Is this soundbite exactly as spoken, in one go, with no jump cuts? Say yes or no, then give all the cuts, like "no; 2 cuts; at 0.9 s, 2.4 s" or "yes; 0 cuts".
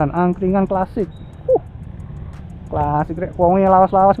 yes; 0 cuts